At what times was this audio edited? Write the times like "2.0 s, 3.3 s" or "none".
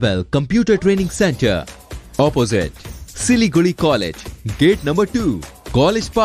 none